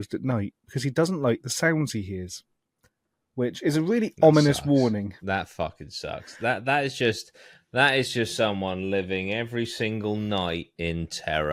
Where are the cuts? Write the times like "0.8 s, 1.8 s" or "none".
none

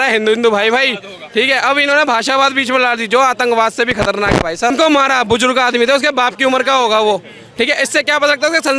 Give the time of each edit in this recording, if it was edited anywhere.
4.7 s

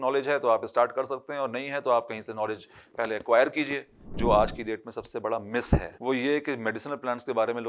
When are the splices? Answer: 4.1 s

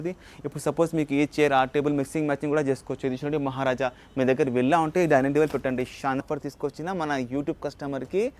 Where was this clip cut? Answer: 6.2 s

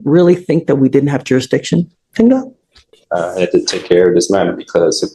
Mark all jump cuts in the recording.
none

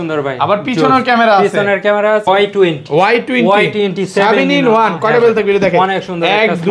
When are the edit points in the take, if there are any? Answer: 2.3 s

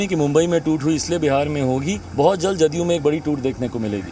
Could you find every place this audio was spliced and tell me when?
2.0 s

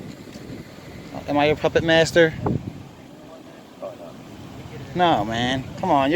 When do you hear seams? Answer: 1.0 s

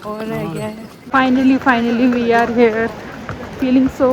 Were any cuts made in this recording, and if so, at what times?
0.9 s

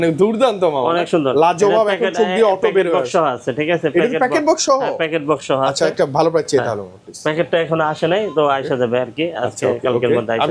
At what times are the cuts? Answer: none

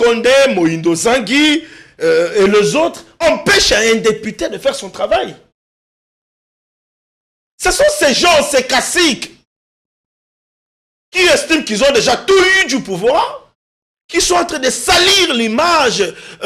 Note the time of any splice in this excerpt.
none

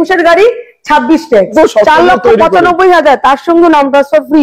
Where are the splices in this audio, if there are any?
1.5 s

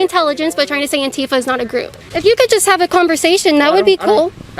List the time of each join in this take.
2.0 s

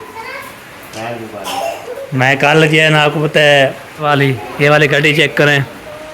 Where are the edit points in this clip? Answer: 4.1 s

